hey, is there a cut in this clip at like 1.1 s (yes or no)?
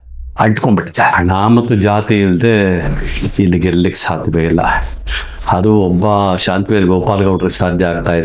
yes